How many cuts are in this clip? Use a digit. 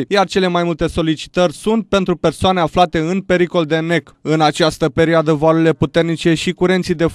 0